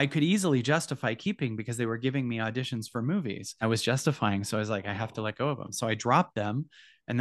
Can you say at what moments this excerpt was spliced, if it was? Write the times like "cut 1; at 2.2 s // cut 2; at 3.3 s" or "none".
cut 1; at 3.6 s